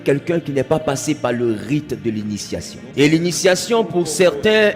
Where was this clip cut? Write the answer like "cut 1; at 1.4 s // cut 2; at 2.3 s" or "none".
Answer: cut 1; at 2.8 s